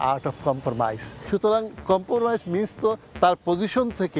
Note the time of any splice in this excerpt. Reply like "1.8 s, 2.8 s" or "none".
1.1 s